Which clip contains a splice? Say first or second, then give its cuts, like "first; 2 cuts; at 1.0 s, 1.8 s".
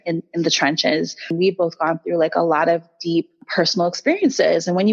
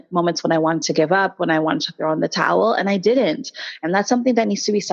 first; 2 cuts; at 1.3 s, 3.5 s